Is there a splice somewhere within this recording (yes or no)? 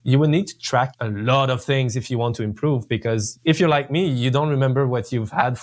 yes